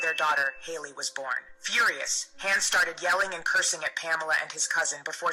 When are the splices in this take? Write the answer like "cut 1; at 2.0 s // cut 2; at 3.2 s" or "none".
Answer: none